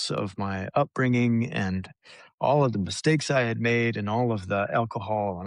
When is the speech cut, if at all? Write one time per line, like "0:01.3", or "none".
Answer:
none